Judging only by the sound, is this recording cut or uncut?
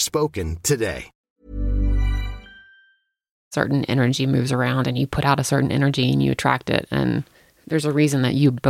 cut